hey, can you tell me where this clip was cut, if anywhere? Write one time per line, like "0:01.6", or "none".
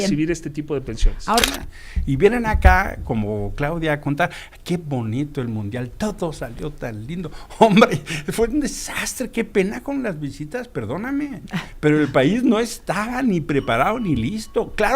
0:01.4